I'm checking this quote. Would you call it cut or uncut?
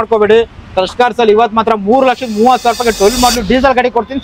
uncut